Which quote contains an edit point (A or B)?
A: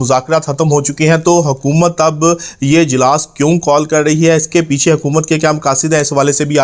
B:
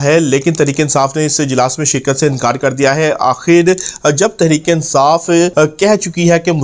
B